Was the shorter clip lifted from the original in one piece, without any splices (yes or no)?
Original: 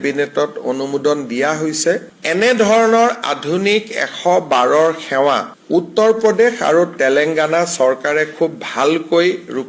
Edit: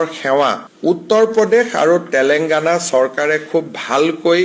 yes